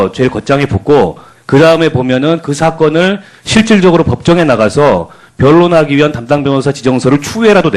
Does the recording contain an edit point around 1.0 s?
yes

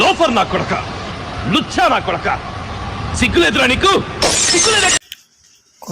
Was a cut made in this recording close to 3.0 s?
no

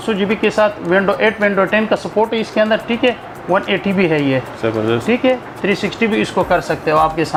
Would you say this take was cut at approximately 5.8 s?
no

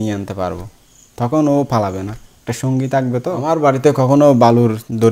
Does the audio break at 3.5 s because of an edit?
yes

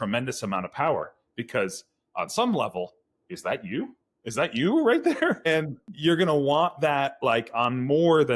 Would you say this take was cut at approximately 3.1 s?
no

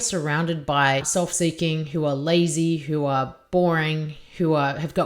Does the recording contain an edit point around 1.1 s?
yes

